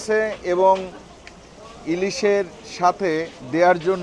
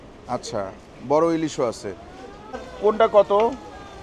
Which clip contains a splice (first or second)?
second